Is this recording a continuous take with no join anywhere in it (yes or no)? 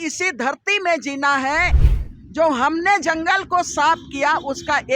no